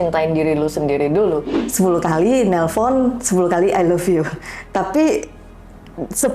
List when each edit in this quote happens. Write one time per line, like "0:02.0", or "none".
0:01.6

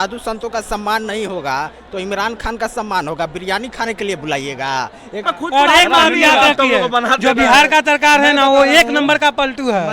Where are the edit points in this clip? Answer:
0:05.3

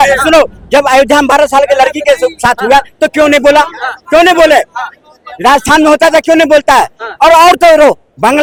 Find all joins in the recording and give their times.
none

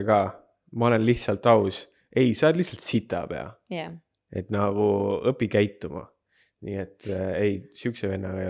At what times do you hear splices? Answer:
none

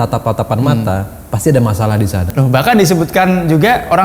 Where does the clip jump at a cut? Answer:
0:02.3

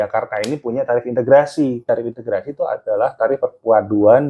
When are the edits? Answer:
0:01.8

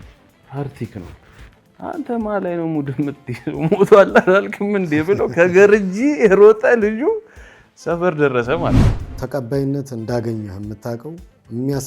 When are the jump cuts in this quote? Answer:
0:08.9

